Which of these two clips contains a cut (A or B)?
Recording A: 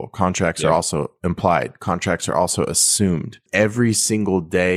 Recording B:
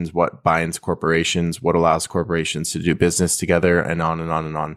A